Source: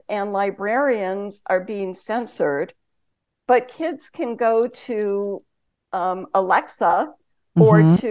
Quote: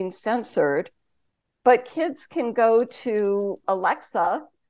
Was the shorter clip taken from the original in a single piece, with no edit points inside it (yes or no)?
no